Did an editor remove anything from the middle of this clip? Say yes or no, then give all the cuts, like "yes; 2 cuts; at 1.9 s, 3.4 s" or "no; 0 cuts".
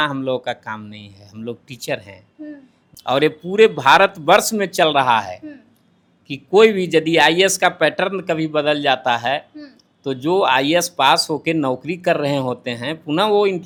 no; 0 cuts